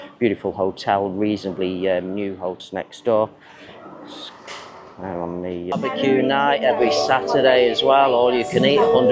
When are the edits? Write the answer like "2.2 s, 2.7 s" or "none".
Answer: 2.6 s, 5.7 s